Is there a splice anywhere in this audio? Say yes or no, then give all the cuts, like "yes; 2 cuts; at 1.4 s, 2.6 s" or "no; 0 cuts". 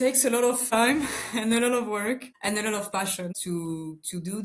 yes; 3 cuts; at 0.7 s, 2.3 s, 3.4 s